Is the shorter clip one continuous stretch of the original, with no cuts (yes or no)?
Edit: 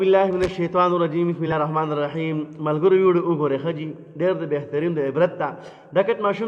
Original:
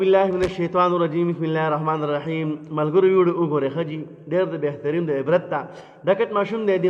no